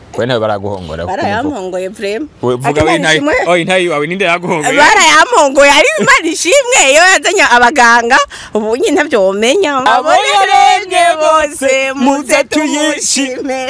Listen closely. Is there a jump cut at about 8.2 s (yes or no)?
no